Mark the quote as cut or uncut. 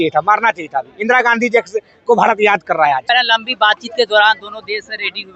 cut